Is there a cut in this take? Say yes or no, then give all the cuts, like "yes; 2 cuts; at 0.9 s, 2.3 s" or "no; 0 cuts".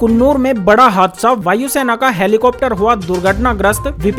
no; 0 cuts